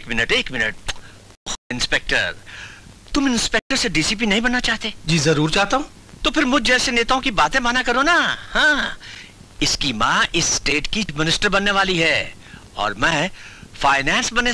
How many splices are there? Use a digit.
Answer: 1